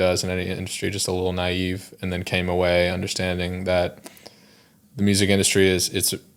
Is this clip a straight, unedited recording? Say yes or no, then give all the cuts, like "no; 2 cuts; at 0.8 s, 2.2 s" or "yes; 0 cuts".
yes; 0 cuts